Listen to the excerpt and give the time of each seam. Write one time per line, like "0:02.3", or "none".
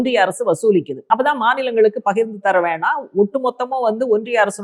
0:00.9